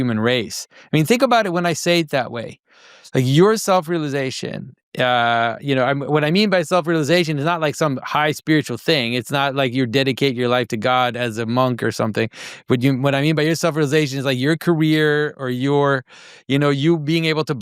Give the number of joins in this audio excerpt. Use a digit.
0